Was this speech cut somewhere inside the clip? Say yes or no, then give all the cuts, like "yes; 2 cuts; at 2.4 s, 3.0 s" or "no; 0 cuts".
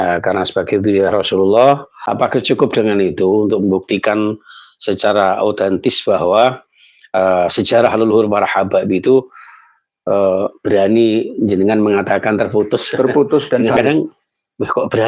yes; 2 cuts; at 2.0 s, 13.8 s